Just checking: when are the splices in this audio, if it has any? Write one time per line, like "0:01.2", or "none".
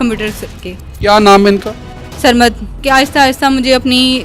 0:02.8